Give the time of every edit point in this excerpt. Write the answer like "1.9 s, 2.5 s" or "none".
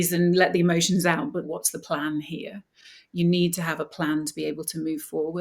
1.5 s